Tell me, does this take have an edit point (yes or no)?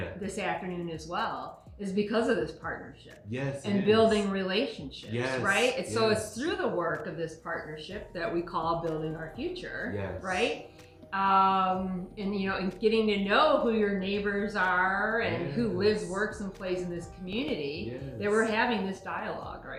no